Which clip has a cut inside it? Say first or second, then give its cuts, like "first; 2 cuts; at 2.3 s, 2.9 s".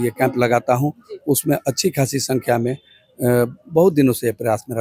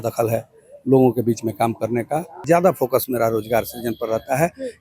second; 1 cut; at 2.4 s